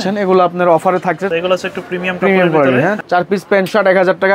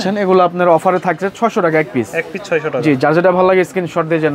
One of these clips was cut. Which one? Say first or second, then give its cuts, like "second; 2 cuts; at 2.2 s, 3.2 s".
first; 2 cuts; at 1.3 s, 3.0 s